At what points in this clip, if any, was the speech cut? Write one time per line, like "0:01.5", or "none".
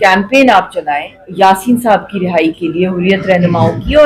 0:01.2